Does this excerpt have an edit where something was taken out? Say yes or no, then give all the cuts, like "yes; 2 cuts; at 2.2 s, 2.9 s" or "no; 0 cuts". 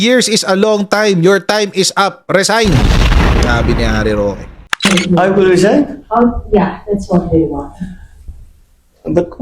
yes; 1 cut; at 4.6 s